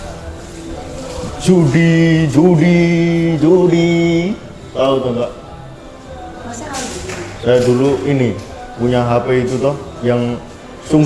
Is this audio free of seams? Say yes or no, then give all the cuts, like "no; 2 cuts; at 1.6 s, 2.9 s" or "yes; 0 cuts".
yes; 0 cuts